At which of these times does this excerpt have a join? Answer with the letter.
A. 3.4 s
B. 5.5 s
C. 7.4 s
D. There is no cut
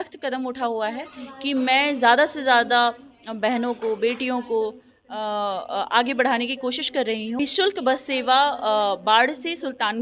C